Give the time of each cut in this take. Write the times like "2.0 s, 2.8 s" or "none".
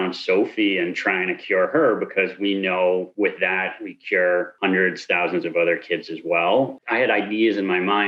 6.8 s